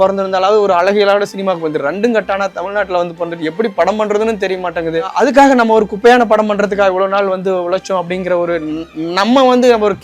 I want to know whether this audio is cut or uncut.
cut